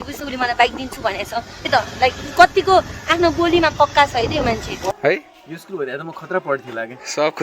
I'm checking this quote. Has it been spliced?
yes; 2 cuts; at 1.7 s, 4.8 s

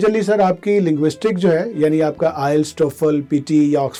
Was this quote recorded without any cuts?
yes; 0 cuts

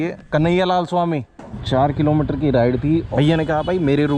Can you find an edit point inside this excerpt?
yes; 2 cuts; at 1.5 s, 3.1 s

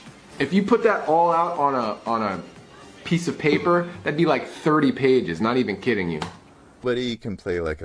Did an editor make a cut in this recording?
yes; 1 cut; at 6.8 s

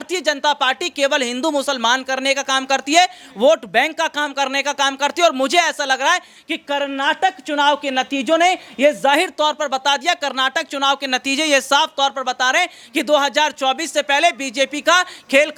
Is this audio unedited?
yes; 0 cuts

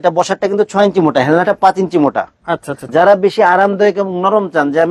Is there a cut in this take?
yes; 1 cut; at 2.8 s

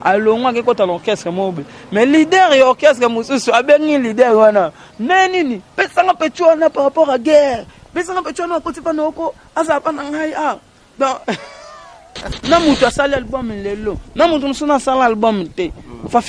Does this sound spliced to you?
yes; 1 cut; at 12.4 s

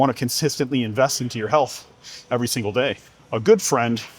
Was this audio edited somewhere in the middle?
yes; 1 cut; at 3.1 s

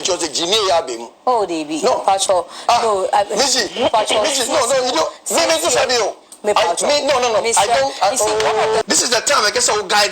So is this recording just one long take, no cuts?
no; 1 cut; at 8.8 s

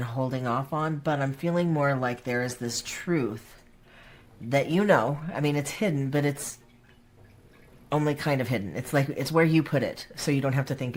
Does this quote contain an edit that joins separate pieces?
no; 0 cuts

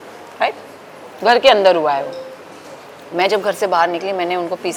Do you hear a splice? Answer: no; 0 cuts

